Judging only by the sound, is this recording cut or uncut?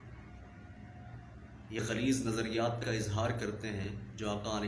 uncut